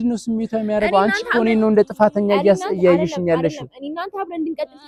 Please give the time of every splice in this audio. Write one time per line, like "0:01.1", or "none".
none